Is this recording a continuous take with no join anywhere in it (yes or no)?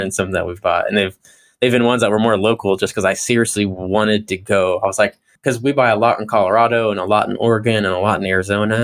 no